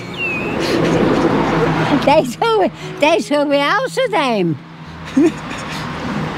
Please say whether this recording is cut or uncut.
uncut